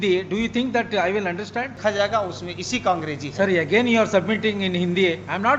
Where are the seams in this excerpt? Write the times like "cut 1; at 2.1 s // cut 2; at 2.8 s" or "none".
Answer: cut 1; at 1.8 s

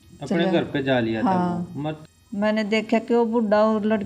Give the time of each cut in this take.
cut 1; at 1.9 s

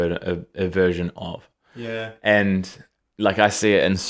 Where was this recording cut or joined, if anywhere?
cut 1; at 2.9 s

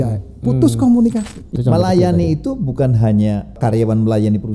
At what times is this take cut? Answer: cut 1; at 1.4 s // cut 2; at 3.5 s

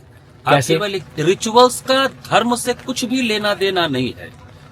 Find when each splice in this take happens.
cut 1; at 1.1 s

